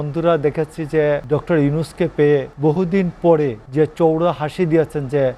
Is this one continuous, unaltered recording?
no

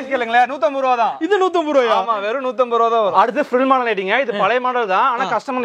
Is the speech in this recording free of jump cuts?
yes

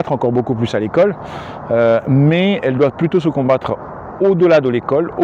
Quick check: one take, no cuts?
yes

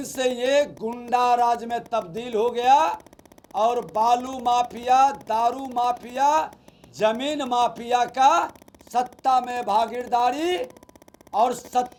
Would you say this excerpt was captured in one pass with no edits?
yes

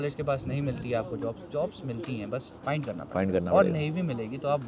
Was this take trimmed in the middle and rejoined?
no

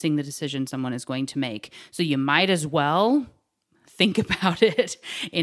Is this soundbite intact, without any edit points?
yes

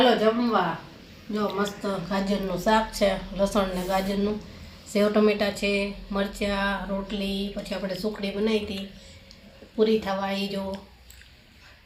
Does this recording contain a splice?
no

